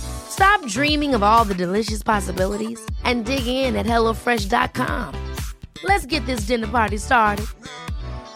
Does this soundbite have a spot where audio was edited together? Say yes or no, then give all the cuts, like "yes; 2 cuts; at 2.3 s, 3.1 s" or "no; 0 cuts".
no; 0 cuts